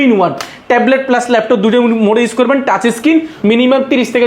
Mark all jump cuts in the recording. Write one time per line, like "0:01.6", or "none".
0:03.3